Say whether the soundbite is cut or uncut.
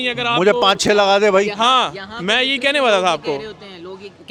uncut